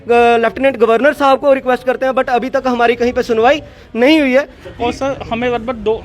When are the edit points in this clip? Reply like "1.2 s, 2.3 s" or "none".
4.6 s